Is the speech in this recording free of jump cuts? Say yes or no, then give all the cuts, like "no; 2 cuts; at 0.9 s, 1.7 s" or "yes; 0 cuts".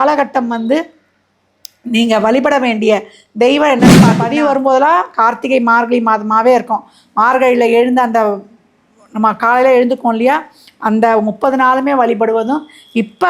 no; 1 cut; at 4.2 s